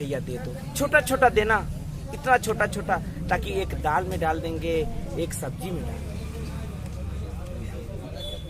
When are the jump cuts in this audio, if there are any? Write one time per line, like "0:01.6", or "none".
none